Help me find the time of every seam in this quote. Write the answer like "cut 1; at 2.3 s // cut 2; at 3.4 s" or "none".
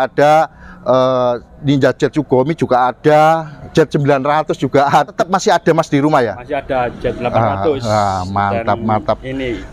cut 1; at 5.1 s